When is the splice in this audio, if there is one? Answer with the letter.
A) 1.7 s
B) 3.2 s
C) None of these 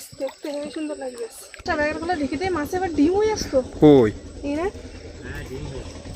A